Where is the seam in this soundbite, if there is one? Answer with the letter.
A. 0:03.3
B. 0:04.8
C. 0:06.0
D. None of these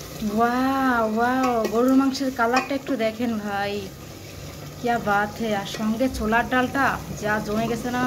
D